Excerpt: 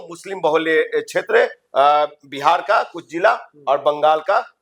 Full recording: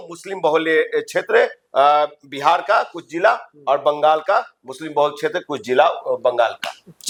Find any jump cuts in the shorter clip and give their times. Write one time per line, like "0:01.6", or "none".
none